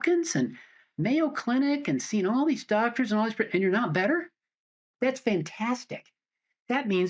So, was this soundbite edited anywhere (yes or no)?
no